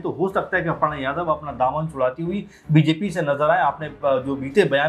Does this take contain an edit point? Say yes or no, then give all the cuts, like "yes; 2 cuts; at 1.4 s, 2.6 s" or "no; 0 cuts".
no; 0 cuts